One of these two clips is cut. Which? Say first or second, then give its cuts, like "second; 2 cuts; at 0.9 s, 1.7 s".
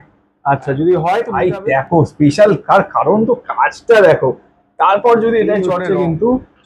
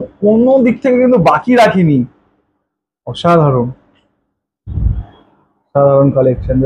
first; 2 cuts; at 1.3 s, 5.8 s